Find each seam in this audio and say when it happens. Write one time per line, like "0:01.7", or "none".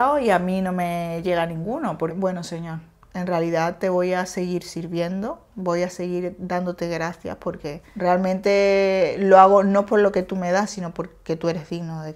0:02.1
0:07.8

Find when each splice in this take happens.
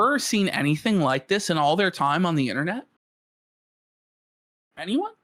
none

